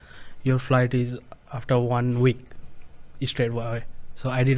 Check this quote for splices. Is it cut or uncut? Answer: uncut